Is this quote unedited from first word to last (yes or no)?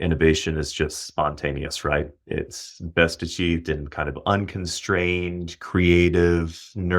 yes